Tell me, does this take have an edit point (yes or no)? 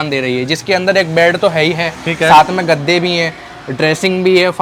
no